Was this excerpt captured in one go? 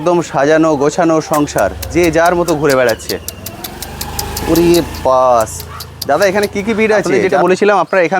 no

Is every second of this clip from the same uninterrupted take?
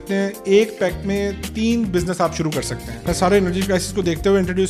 no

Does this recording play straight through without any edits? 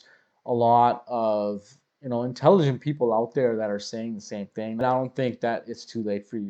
no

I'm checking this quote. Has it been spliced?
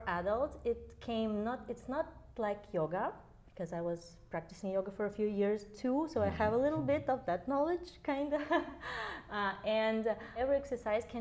yes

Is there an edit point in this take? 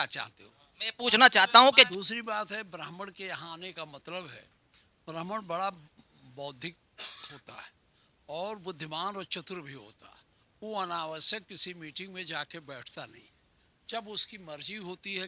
yes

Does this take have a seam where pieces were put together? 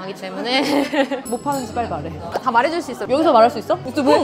yes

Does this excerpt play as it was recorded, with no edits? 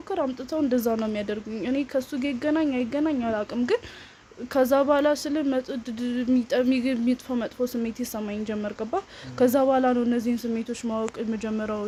yes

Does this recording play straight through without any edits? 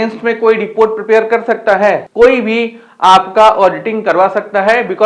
no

